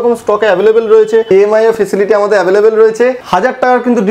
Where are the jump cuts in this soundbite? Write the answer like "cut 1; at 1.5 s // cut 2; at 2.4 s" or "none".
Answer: cut 1; at 1.3 s // cut 2; at 3.2 s